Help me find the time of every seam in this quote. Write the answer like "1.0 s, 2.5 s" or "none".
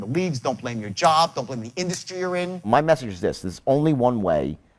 2.7 s